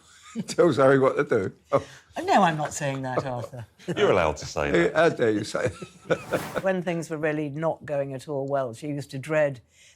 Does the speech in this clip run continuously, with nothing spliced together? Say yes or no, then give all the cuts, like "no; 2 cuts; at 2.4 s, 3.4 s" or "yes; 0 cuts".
no; 1 cut; at 6.6 s